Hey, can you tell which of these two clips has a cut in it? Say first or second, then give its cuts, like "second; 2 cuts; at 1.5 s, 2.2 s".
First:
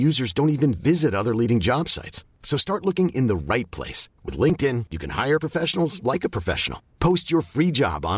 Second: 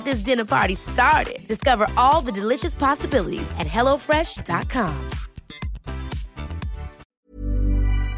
second; 1 cut; at 7.0 s